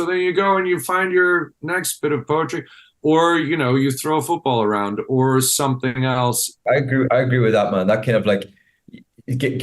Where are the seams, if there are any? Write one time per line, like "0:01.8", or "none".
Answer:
0:06.6